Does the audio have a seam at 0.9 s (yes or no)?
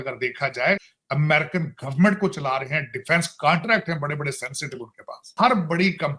yes